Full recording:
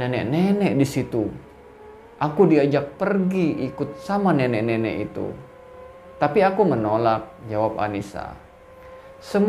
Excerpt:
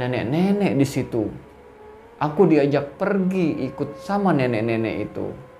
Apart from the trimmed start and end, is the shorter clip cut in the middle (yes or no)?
no